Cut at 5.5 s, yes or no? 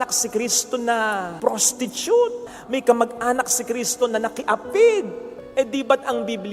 no